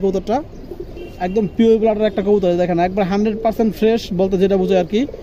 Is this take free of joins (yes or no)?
yes